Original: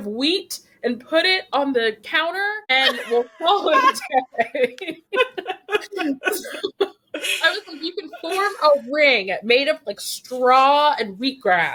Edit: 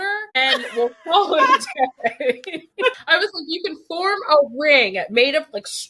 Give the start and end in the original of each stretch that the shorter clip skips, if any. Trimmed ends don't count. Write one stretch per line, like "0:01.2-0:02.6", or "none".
0:05.3-0:07.3